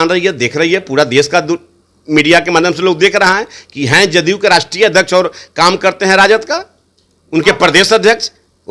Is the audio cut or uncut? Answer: uncut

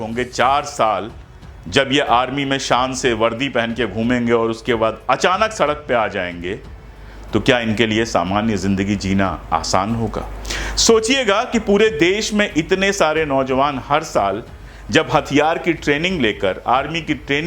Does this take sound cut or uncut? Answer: uncut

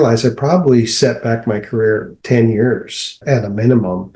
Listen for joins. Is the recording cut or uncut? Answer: cut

